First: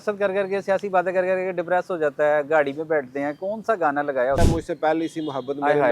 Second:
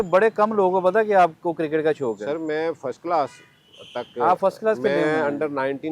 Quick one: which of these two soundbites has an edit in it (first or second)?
first